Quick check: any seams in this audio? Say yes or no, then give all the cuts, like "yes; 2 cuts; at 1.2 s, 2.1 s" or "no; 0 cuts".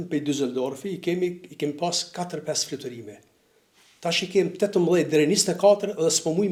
no; 0 cuts